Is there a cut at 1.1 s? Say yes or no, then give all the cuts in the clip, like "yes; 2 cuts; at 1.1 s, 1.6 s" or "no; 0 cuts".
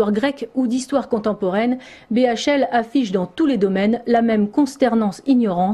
no; 1 cut; at 4.5 s